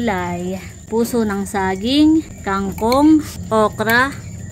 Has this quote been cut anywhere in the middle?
yes; 3 cuts; at 0.8 s, 2.4 s, 3.4 s

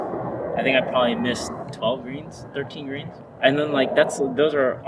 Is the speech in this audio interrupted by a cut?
yes; 2 cuts; at 1.6 s, 3.2 s

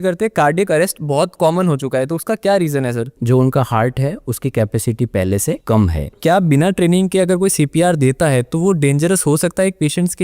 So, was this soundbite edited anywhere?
yes; 2 cuts; at 3.2 s, 6.1 s

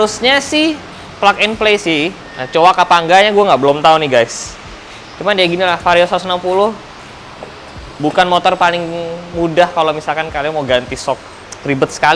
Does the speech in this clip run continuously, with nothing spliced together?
yes; 0 cuts

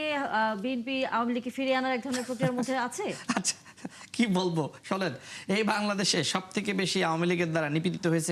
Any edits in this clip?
no; 0 cuts

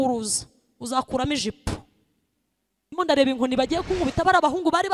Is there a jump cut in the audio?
yes; 1 cut; at 2.3 s

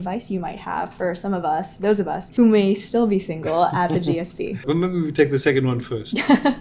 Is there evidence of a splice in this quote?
yes; 2 cuts; at 2.2 s, 4.6 s

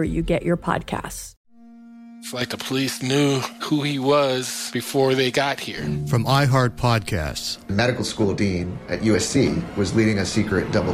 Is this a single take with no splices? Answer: no; 1 cut; at 1.1 s

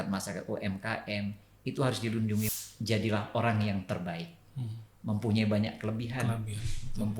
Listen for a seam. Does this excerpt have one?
yes; 1 cut; at 2.5 s

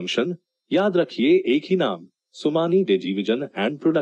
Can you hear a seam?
no; 0 cuts

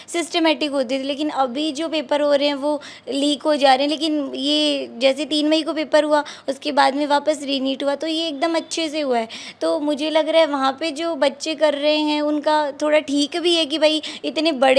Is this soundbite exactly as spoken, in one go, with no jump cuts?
yes; 0 cuts

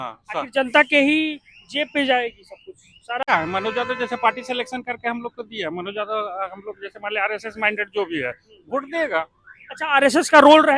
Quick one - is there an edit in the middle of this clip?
yes; 1 cut; at 3.3 s

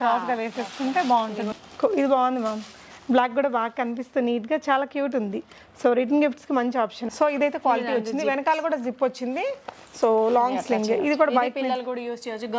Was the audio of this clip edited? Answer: yes; 2 cuts; at 1.5 s, 7.1 s

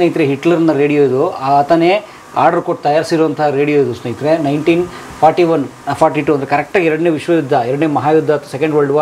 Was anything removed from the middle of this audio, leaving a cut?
no; 0 cuts

